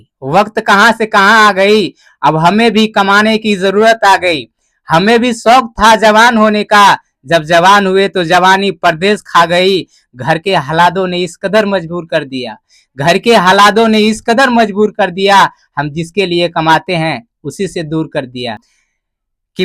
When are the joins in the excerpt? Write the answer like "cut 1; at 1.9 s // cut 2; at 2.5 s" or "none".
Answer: cut 1; at 18.7 s